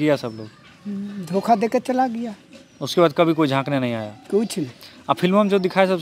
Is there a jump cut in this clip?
no; 0 cuts

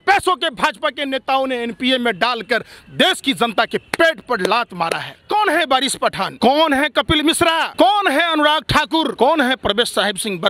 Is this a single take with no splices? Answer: no; 4 cuts; at 5.1 s, 6.3 s, 7.7 s, 9.1 s

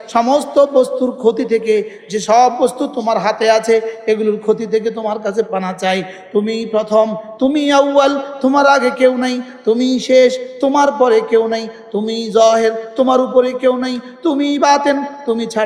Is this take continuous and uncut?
yes; 0 cuts

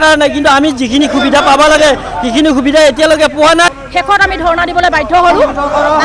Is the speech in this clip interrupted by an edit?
yes; 1 cut; at 3.7 s

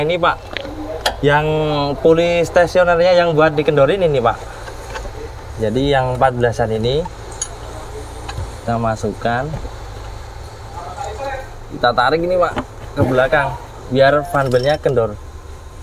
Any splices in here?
no; 0 cuts

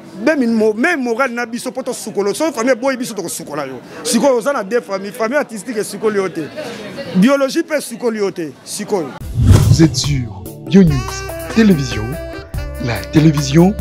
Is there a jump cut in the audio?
yes; 1 cut; at 9.2 s

